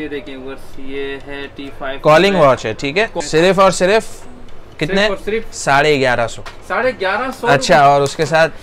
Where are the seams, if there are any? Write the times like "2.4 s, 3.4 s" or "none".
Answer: 3.1 s